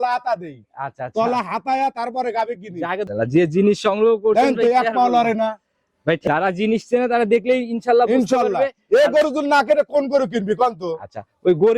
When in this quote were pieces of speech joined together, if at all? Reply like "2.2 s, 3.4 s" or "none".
3.1 s, 6.2 s